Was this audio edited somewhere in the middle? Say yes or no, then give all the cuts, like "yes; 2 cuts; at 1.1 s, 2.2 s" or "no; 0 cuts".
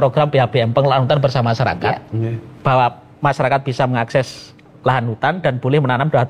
no; 0 cuts